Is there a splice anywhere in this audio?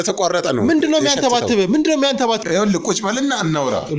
yes; 1 cut; at 2.4 s

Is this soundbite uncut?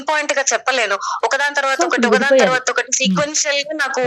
yes; 0 cuts

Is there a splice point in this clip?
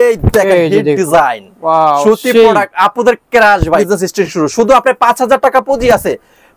yes; 1 cut; at 3.8 s

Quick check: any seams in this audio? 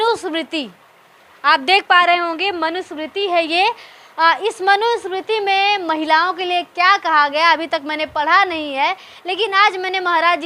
no; 0 cuts

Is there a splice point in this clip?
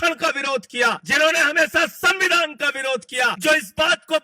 yes; 2 cuts; at 1.0 s, 3.4 s

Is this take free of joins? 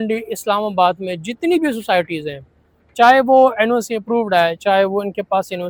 yes; 0 cuts

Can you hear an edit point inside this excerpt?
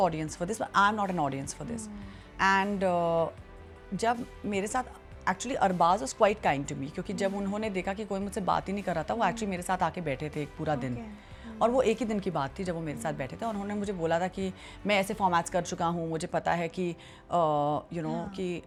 no; 0 cuts

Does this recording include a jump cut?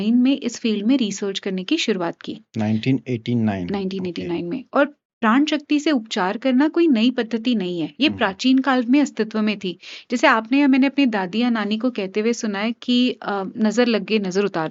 no; 0 cuts

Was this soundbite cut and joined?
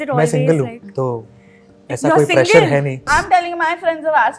yes; 1 cut; at 3.1 s

